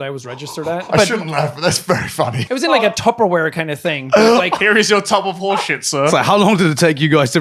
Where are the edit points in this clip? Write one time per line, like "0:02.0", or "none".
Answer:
0:00.9
0:02.4
0:06.1